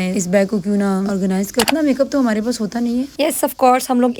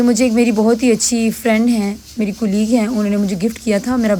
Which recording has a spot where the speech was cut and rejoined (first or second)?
first